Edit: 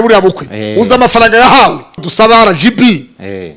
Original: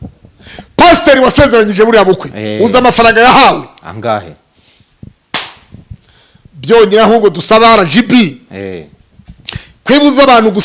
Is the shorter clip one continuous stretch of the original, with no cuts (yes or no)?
no